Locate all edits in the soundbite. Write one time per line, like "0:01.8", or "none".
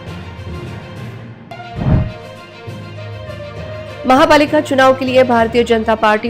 0:01.4